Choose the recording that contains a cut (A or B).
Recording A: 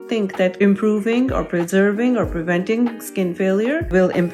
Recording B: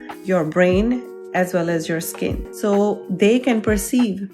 B